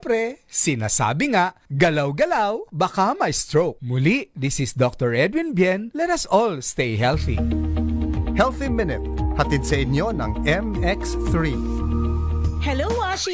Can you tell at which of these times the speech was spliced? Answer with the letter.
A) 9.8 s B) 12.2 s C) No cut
B